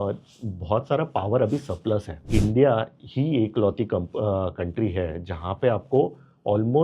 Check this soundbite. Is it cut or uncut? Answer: cut